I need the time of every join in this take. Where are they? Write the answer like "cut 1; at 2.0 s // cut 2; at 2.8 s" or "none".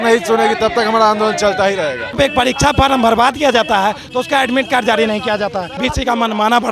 cut 1; at 2.2 s // cut 2; at 5.8 s

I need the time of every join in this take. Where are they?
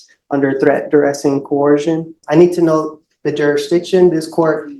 cut 1; at 2.2 s

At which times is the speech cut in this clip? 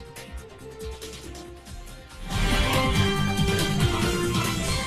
cut 1; at 2.9 s

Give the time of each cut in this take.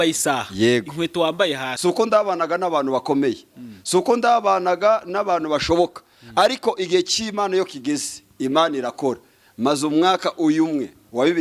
cut 1; at 1.7 s

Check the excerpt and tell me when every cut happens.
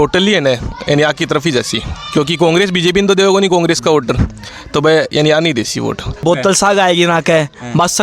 cut 1; at 6.2 s

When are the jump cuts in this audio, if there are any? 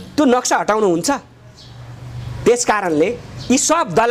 none

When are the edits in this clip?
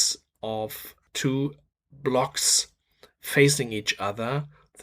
cut 1; at 1.0 s

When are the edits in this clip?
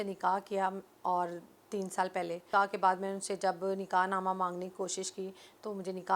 cut 1; at 2.4 s

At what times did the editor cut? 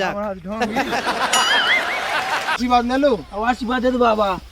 cut 1; at 2.6 s

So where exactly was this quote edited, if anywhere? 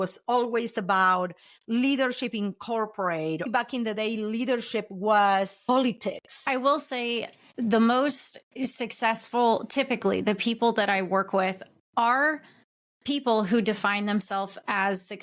cut 1; at 3.4 s // cut 2; at 6.3 s

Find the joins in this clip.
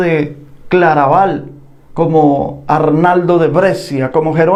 none

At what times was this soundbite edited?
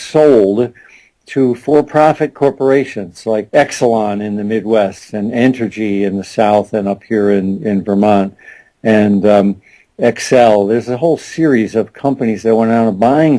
none

